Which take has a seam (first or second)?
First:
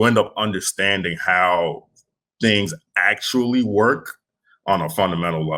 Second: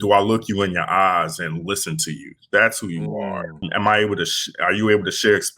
second